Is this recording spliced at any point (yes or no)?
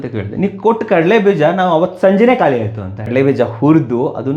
yes